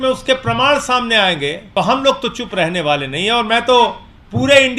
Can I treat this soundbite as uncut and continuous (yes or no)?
no